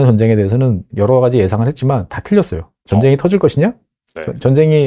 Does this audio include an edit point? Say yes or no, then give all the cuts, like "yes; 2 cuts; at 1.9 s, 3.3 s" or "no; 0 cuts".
no; 0 cuts